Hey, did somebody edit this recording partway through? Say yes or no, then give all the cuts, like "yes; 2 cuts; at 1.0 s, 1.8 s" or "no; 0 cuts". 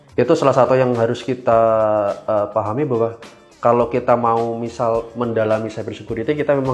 no; 0 cuts